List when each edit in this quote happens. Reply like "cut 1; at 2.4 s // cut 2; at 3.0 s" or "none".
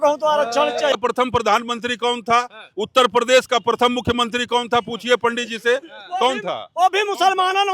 cut 1; at 0.9 s